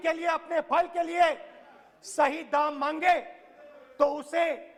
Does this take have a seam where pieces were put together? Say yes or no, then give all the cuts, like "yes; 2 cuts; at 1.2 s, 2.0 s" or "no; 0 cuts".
no; 0 cuts